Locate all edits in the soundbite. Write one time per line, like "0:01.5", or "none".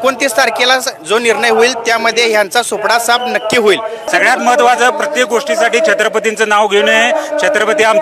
0:04.1